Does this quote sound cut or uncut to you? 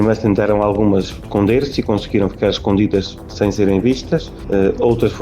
cut